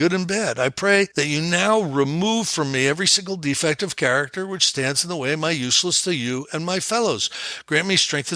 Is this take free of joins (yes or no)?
no